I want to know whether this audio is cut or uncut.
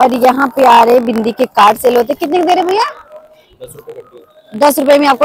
uncut